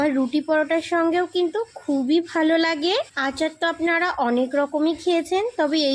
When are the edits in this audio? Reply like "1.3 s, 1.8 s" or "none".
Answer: 3.2 s